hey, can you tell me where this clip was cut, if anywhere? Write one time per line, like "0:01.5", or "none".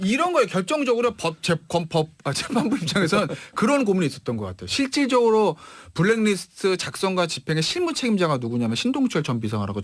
none